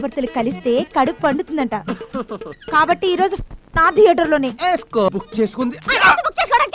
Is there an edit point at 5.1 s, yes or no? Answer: yes